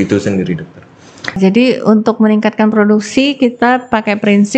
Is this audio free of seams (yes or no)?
no